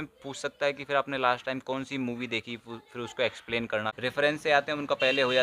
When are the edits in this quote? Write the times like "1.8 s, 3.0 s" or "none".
4.0 s